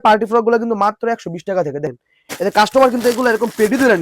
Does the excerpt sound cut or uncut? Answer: cut